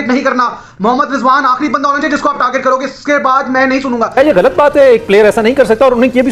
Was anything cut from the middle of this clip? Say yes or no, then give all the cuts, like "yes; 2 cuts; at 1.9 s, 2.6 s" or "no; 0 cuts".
yes; 1 cut; at 4.1 s